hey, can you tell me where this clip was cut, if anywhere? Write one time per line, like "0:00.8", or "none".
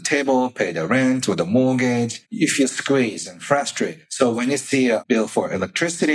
0:02.2
0:04.0
0:05.0

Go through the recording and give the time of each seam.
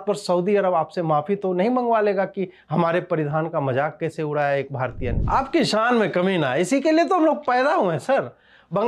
0:05.1

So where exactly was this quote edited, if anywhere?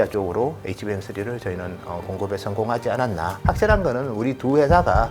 0:03.4

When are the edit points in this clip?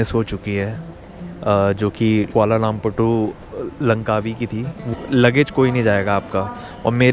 0:04.8

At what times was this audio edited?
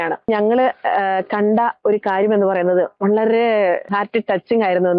0:03.9

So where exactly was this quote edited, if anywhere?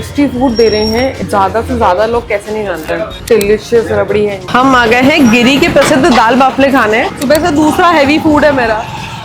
0:03.1
0:04.4
0:07.1

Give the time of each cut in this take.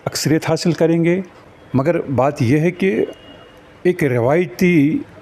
0:01.4

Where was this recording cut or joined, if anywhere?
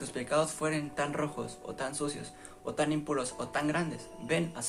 none

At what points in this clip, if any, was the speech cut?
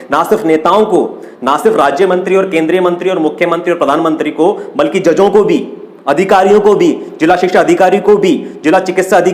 none

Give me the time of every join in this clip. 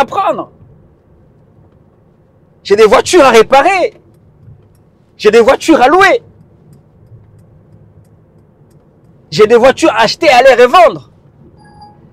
none

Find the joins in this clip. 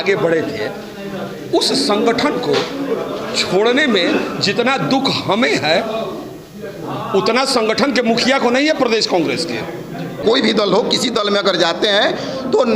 0:10.2

